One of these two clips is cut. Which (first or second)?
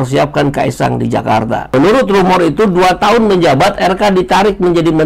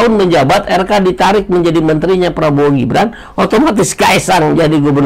first